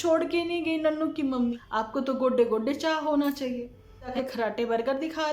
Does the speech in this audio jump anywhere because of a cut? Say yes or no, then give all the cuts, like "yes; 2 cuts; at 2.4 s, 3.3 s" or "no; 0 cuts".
yes; 2 cuts; at 1.6 s, 4.1 s